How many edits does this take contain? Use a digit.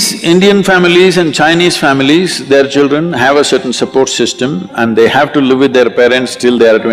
0